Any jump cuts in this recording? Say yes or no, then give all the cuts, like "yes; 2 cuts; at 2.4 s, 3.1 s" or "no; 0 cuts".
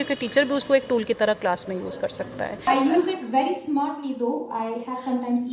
yes; 1 cut; at 2.6 s